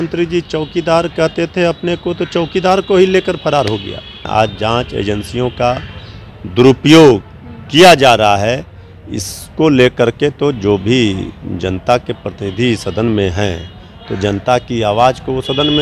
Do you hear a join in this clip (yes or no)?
yes